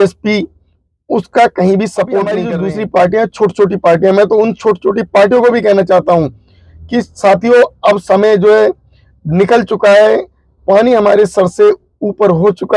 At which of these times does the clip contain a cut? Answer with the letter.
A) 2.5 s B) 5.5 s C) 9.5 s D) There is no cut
A